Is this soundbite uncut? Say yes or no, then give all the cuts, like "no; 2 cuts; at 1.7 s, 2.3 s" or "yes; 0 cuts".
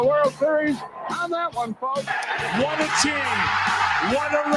no; 2 cuts; at 2.4 s, 3.6 s